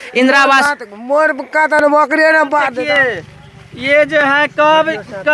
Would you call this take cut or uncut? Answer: cut